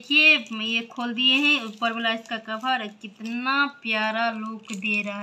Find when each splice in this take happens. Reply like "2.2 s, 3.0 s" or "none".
none